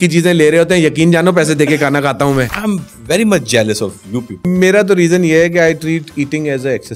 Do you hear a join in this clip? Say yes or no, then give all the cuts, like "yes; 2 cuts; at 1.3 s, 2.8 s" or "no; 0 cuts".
yes; 2 cuts; at 2.5 s, 4.5 s